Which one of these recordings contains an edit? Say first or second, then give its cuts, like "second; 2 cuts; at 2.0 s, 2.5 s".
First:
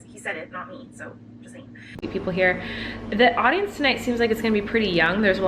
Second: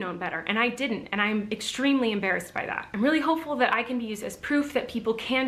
first; 1 cut; at 1.8 s